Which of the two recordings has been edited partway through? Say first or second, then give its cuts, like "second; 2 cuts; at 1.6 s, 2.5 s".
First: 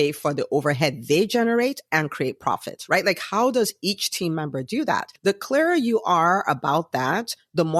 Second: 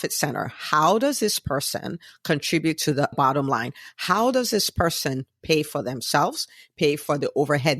second; 1 cut; at 3.1 s